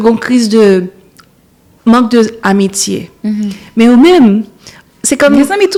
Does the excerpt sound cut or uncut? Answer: uncut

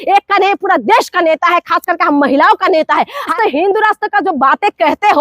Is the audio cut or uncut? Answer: cut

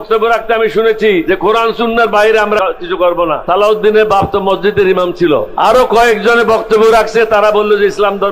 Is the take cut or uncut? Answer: cut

